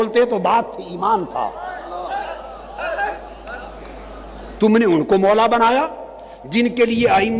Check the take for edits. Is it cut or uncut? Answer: uncut